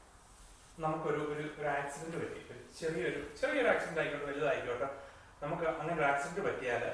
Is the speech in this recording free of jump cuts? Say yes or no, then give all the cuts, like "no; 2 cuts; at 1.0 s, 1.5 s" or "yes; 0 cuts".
yes; 0 cuts